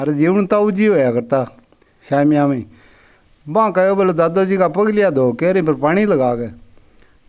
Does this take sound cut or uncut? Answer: uncut